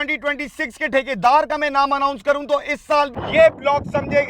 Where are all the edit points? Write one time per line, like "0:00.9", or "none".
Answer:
0:03.1